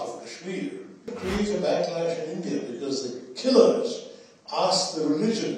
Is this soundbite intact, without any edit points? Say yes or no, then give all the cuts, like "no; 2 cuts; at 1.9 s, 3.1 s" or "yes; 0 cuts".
no; 1 cut; at 1.2 s